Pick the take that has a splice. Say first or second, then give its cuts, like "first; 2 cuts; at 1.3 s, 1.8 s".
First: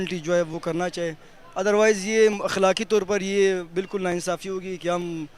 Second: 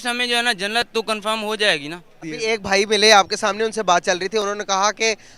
second; 1 cut; at 2.2 s